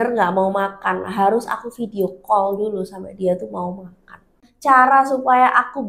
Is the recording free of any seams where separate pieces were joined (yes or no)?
no